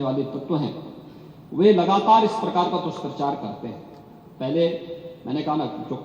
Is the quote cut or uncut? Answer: uncut